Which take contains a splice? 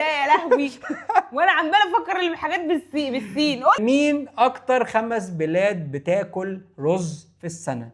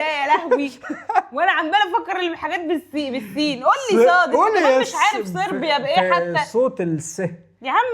first; 1 cut; at 3.8 s

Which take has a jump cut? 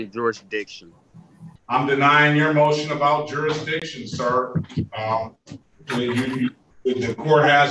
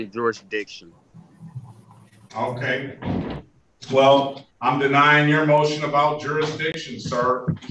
first; 1 cut; at 1.5 s

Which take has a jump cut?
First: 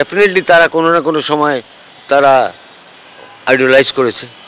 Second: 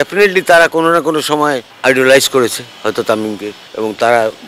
second; 2 cuts; at 1.7 s, 3.6 s

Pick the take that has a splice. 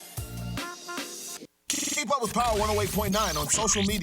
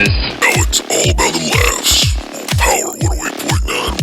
first; 1 cut; at 1.4 s

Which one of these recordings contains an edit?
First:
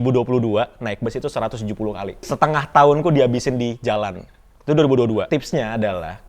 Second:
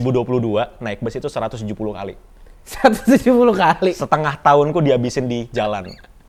first; 2 cuts; at 2.3 s, 5.3 s

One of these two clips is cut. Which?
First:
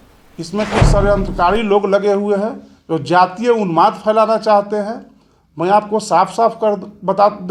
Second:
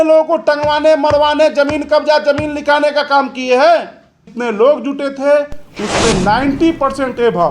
second; 1 cut; at 4.3 s

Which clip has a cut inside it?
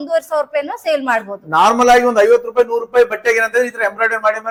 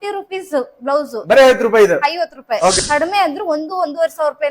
second; 1 cut; at 2.8 s

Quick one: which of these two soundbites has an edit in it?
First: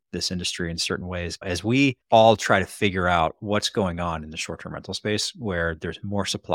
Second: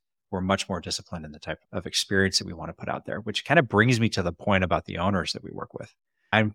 first; 1 cut; at 2.0 s

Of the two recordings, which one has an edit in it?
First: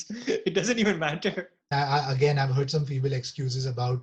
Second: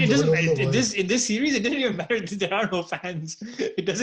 first; 1 cut; at 1.7 s

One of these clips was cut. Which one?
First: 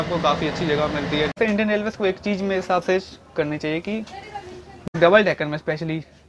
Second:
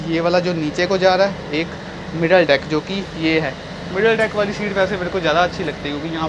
first; 2 cuts; at 1.4 s, 4.9 s

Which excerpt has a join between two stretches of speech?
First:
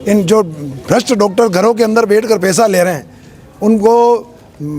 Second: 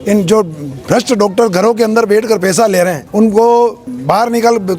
second; 2 cuts; at 3.0 s, 3.9 s

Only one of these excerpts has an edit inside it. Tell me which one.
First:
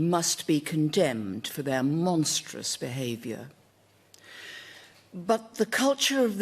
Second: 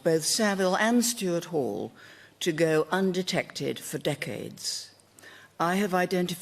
first; 1 cut; at 2.0 s

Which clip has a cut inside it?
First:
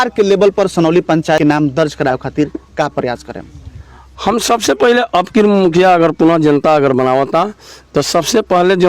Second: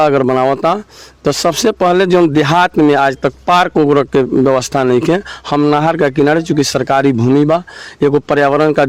first; 1 cut; at 1.4 s

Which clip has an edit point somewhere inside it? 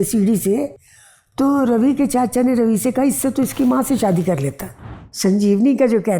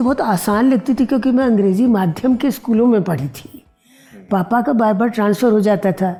first; 1 cut; at 5.0 s

